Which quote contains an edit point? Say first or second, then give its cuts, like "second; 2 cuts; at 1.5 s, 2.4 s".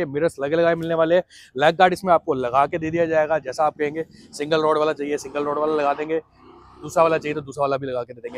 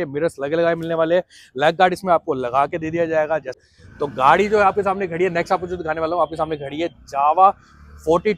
second; 1 cut; at 4.0 s